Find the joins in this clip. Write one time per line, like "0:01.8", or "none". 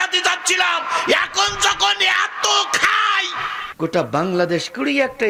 none